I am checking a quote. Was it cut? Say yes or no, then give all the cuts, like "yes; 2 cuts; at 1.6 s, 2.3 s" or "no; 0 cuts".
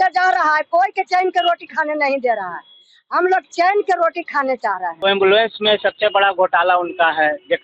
yes; 1 cut; at 4.9 s